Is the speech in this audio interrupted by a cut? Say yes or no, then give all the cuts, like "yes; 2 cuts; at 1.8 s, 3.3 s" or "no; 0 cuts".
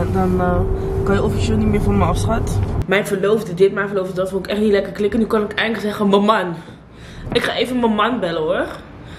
yes; 1 cut; at 2.8 s